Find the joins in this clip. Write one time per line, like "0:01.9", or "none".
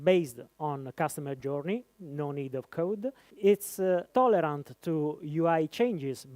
0:03.3
0:04.1